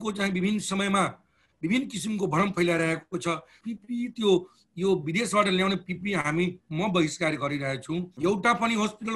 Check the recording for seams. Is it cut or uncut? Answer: cut